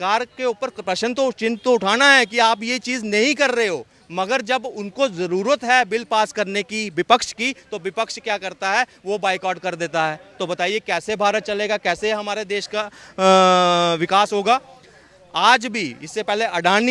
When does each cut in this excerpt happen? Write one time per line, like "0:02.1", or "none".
none